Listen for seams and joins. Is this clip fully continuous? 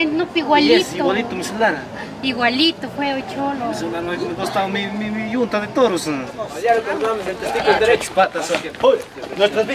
no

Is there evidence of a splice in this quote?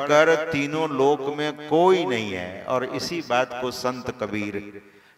no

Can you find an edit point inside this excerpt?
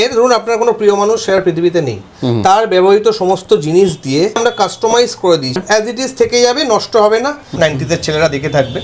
yes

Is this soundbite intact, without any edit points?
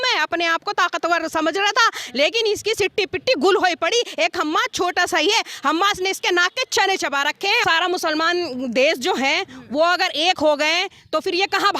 no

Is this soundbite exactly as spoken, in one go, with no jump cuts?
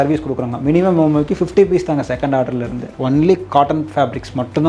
no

